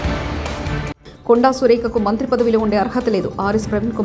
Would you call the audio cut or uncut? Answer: uncut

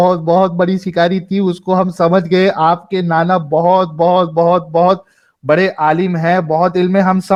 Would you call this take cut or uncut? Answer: uncut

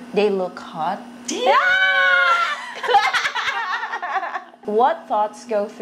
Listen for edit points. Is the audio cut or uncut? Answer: cut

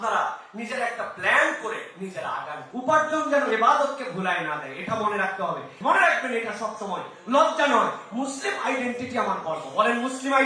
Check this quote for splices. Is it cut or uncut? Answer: cut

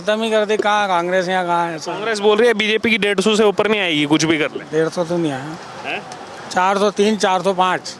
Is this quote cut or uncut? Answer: uncut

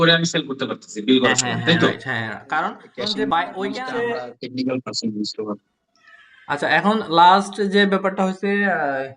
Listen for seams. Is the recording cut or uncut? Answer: cut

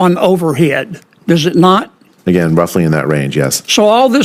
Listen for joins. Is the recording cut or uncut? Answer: uncut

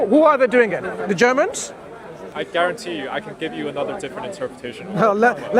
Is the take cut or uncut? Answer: cut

